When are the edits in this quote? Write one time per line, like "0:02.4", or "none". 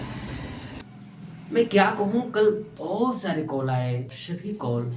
0:00.8
0:04.1